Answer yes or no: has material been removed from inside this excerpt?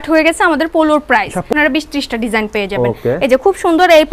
yes